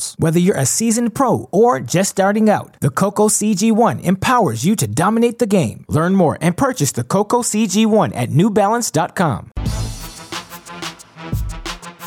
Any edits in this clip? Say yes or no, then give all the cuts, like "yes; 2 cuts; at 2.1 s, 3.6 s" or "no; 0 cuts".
yes; 1 cut; at 9.5 s